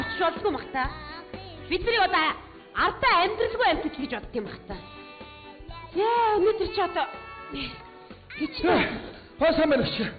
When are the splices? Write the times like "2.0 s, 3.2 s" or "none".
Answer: none